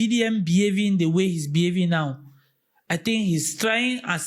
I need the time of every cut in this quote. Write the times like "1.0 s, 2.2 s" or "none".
none